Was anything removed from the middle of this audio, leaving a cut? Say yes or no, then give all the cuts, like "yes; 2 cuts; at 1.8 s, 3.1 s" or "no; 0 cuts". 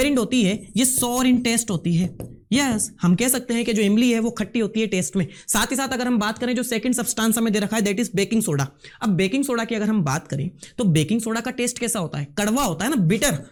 no; 0 cuts